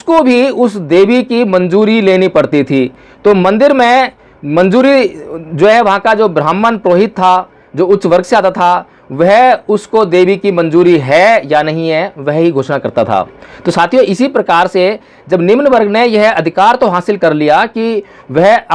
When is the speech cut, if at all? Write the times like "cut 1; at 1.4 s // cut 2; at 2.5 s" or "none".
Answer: none